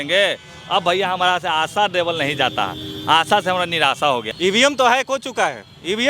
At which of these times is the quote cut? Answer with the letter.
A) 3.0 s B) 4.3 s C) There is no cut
B